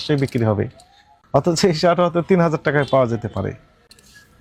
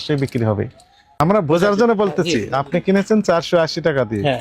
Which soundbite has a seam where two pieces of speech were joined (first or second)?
second